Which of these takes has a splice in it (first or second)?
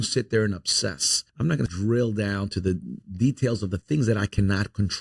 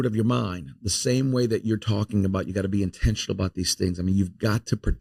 first